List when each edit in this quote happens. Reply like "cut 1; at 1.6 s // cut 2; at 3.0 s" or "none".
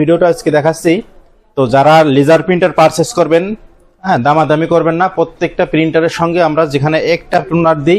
none